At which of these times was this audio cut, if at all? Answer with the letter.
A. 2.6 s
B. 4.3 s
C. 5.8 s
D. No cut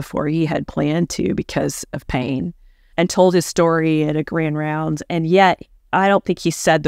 D